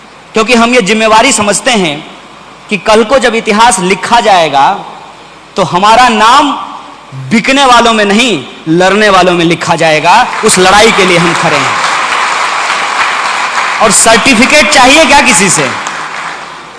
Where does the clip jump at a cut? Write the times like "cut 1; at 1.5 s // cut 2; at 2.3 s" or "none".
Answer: none